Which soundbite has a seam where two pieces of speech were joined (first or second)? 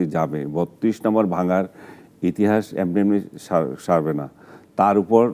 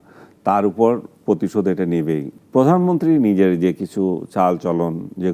second